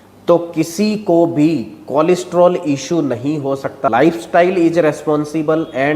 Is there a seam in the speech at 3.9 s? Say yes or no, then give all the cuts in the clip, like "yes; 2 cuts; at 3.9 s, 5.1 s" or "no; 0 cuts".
yes; 1 cut; at 3.9 s